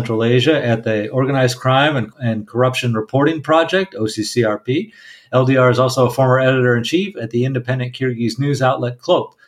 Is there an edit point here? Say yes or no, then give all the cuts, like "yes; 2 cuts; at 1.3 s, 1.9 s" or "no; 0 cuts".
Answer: yes; 1 cut; at 2.1 s